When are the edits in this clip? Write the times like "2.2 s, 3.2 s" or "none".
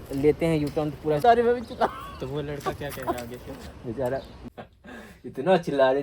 1.2 s, 4.4 s